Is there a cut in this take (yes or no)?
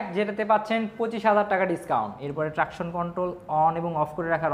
yes